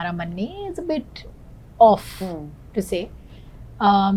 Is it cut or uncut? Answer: uncut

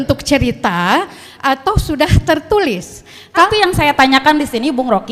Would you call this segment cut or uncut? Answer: cut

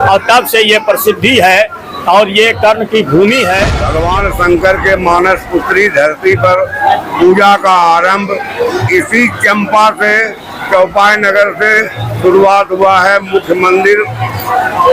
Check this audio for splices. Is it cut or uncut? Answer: cut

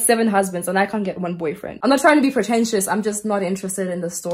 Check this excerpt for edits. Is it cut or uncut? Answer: cut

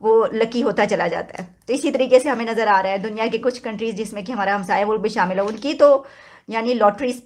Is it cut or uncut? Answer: uncut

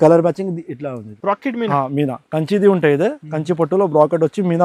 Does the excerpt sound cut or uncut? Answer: cut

